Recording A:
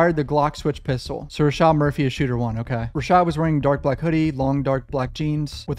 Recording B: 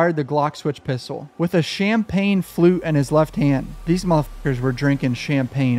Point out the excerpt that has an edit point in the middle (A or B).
B